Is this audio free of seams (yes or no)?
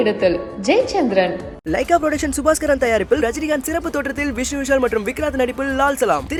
yes